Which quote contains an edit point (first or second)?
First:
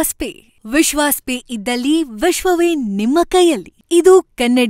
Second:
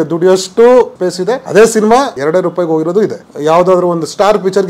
second